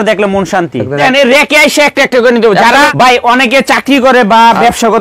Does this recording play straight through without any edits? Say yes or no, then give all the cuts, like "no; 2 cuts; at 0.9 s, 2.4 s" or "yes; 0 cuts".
no; 2 cuts; at 1.0 s, 2.9 s